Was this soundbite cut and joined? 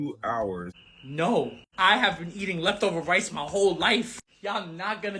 yes; 1 cut; at 1.1 s

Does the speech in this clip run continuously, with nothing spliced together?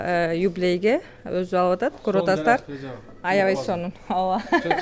yes; 0 cuts

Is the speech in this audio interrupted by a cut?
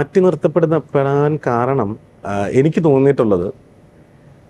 no; 0 cuts

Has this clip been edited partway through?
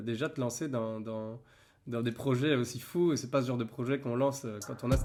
no; 0 cuts

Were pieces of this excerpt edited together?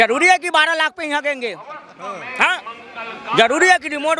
no; 0 cuts

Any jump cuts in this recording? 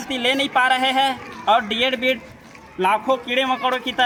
no; 0 cuts

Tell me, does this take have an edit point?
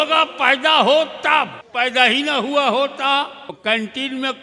yes; 2 cuts; at 1.6 s, 3.6 s

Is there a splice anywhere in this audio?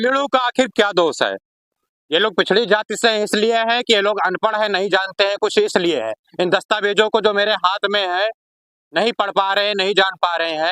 no; 0 cuts

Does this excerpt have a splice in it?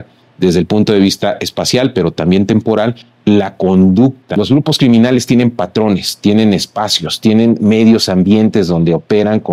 yes; 1 cut; at 4.2 s

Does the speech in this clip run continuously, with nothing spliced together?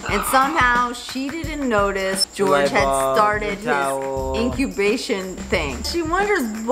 no; 2 cuts; at 2.2 s, 5.9 s

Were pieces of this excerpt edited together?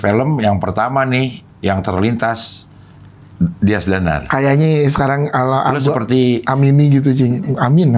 no; 0 cuts

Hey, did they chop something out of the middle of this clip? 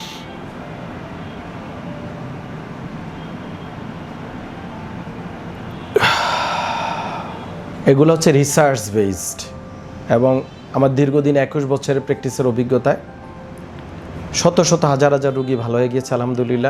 yes; 1 cut; at 7.7 s

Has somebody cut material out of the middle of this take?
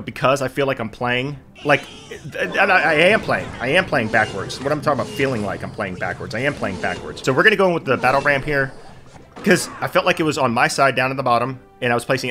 no; 0 cuts

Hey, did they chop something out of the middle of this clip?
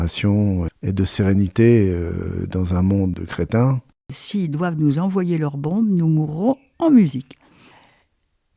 yes; 1 cut; at 3.9 s

